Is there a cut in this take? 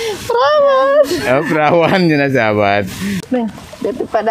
yes; 1 cut; at 3.2 s

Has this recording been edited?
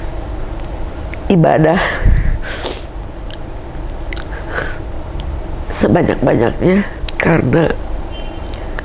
yes; 1 cut; at 7.0 s

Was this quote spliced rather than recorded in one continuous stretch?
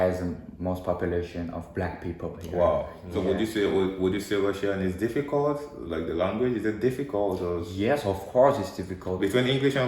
yes; 1 cut; at 3.0 s

